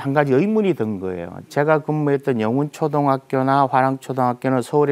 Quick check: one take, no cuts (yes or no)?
yes